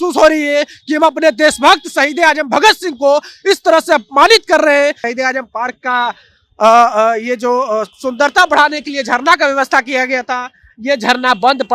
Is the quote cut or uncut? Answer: cut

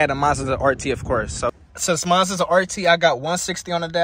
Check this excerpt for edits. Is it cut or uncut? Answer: cut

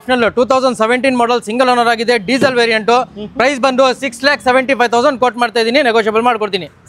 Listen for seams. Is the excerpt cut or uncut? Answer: uncut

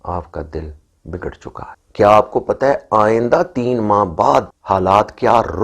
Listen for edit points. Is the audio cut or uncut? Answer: cut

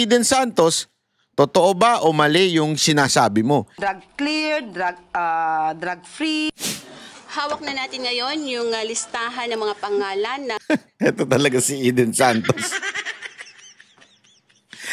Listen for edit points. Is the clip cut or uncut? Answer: cut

